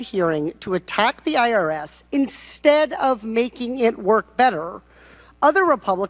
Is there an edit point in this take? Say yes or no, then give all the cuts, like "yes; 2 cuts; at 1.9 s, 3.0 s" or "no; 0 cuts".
no; 0 cuts